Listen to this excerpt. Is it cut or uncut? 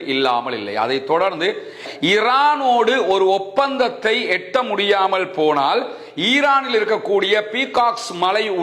cut